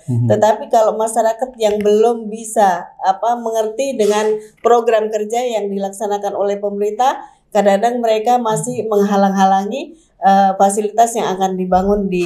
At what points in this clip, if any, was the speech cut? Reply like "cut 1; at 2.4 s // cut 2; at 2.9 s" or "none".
none